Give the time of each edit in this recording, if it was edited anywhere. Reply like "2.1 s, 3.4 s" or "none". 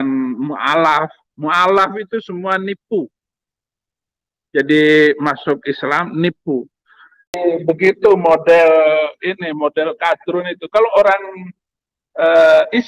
7.4 s